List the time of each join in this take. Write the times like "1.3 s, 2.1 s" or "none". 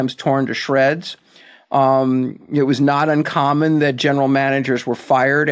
none